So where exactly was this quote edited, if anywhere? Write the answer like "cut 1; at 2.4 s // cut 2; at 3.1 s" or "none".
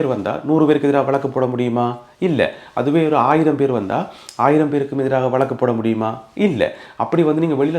none